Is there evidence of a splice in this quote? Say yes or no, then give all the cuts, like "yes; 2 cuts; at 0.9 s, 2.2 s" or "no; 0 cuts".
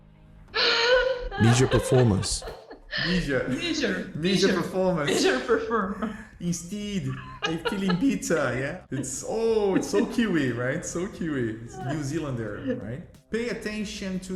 yes; 3 cuts; at 8.7 s, 11.7 s, 13.1 s